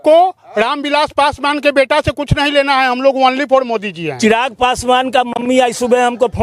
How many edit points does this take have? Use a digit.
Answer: 1